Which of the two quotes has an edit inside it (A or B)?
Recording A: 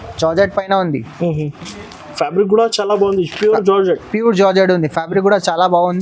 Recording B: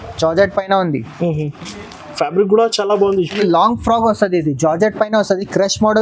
B